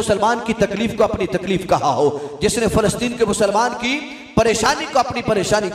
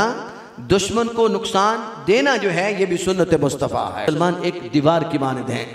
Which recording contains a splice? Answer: second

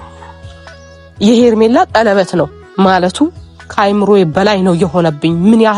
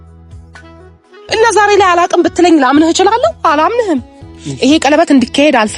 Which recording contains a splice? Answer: second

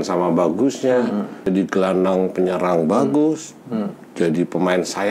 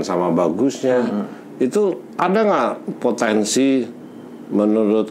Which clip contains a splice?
first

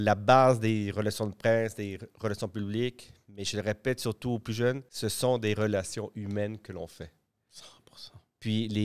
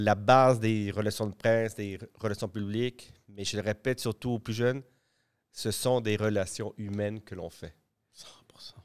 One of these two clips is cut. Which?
first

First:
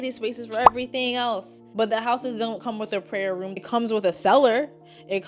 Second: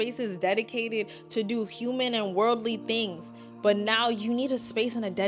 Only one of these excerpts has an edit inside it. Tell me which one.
first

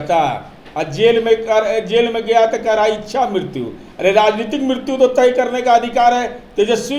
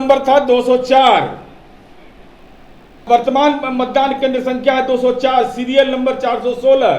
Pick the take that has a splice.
second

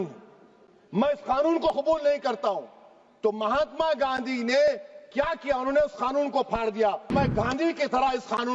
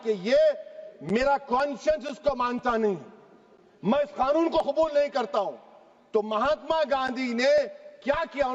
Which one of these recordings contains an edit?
first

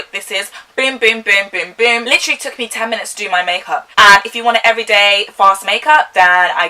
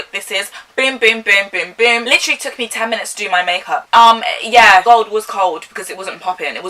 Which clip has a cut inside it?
second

